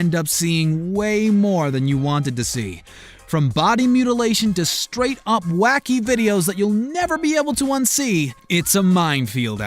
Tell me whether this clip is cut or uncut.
cut